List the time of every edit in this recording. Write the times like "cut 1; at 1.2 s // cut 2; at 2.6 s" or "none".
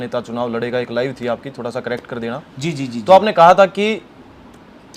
none